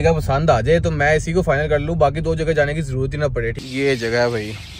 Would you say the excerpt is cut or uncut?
cut